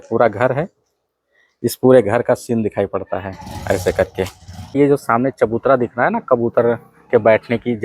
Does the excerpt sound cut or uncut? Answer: cut